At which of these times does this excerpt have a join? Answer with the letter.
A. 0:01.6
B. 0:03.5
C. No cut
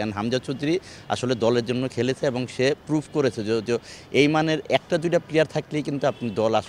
C